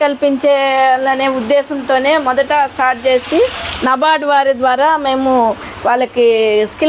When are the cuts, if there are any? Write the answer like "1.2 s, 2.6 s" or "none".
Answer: none